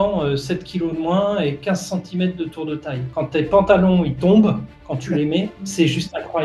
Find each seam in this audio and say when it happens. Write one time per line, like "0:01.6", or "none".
0:03.1